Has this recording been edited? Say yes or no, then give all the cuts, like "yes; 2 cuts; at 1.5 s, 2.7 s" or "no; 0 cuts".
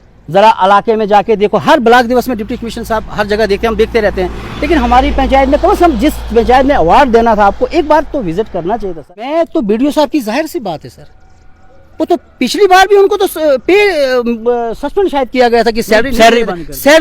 yes; 1 cut; at 9.3 s